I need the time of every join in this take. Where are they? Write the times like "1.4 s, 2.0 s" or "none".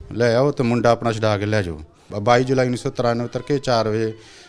2.1 s